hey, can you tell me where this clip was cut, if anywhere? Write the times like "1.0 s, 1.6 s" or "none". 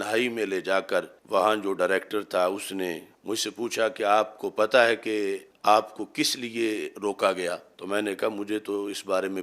1.2 s, 3.1 s, 5.5 s, 7.7 s